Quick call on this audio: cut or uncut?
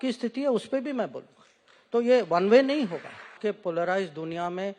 cut